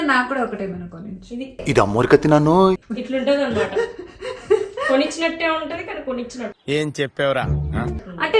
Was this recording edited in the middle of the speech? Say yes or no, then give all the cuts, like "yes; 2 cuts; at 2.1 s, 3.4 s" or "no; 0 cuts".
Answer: no; 0 cuts